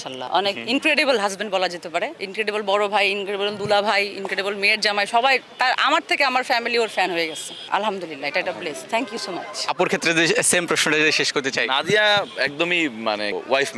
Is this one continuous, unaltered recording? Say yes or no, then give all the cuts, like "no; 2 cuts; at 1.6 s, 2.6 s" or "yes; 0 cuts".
yes; 0 cuts